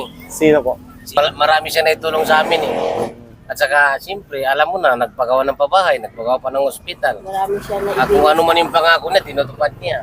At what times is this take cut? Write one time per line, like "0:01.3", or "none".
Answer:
0:01.2